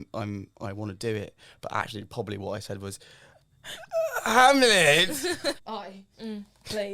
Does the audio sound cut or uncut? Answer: cut